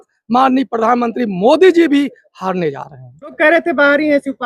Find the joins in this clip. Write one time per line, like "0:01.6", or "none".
0:03.3